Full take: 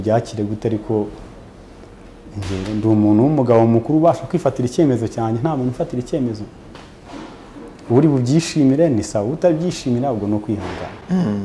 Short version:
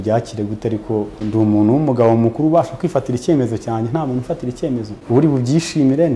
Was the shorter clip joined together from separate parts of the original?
yes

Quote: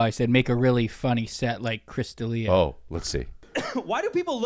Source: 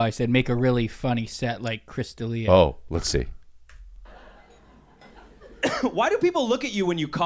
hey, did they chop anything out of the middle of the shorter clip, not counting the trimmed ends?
yes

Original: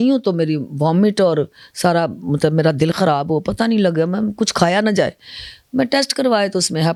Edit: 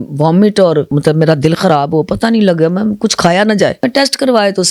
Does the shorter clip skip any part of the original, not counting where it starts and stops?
yes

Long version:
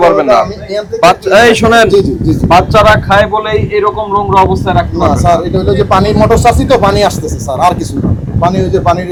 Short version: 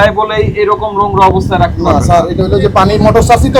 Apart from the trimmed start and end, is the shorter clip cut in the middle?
no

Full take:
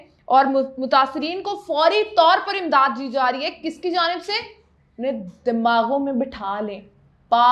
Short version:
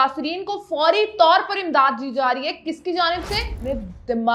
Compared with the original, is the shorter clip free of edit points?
no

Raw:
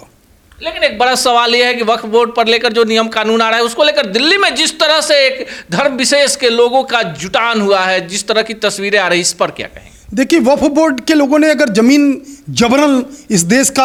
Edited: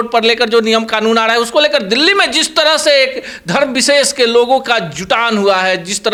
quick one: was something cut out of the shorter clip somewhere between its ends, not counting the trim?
no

